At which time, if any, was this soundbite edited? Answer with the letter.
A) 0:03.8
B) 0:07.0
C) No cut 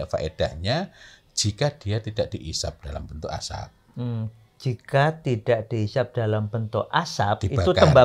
C